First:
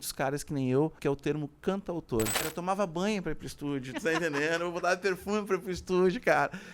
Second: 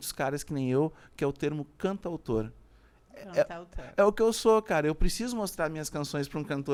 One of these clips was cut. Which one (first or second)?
first